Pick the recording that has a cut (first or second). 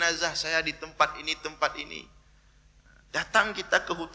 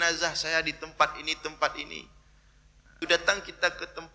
second